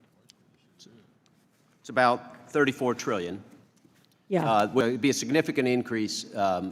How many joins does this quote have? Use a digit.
1